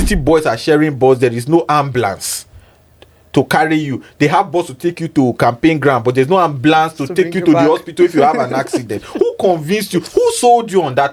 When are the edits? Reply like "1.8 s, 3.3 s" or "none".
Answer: none